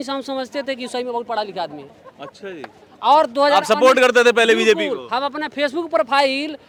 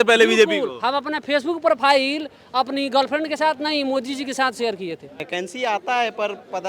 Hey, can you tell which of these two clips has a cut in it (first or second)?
second